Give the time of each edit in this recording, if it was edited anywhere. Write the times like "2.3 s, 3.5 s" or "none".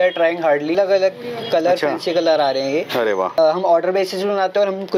0.8 s, 3.4 s